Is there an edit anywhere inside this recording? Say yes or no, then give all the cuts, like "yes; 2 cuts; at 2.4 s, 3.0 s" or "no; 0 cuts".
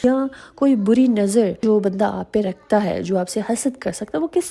no; 0 cuts